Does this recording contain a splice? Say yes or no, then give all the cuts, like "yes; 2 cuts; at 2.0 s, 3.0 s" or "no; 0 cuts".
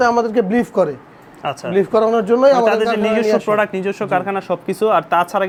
no; 0 cuts